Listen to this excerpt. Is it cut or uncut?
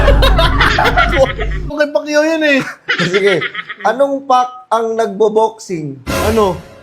cut